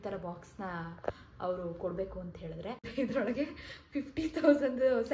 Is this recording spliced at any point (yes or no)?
yes